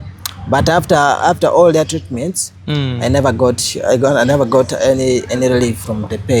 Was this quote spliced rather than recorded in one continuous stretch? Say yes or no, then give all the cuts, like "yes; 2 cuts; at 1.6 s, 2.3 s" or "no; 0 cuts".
no; 0 cuts